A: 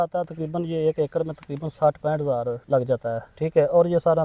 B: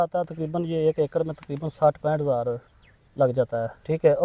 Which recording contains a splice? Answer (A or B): A